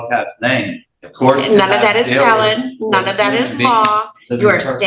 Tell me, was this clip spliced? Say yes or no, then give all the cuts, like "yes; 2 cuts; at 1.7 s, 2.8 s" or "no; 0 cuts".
no; 0 cuts